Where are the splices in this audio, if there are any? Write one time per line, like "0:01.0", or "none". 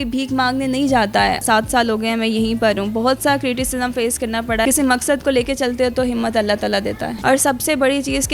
0:01.4
0:04.6
0:07.1